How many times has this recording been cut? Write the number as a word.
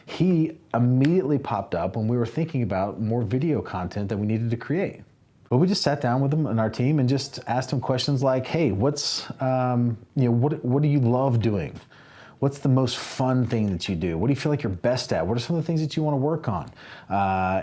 one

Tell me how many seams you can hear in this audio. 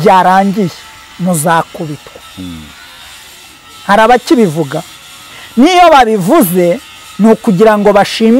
zero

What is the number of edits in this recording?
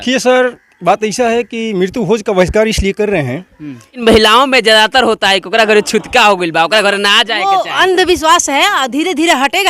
one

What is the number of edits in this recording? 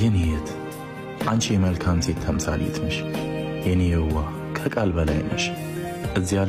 zero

